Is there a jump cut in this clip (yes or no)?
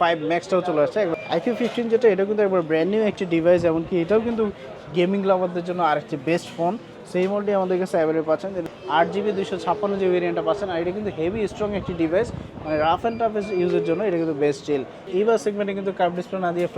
yes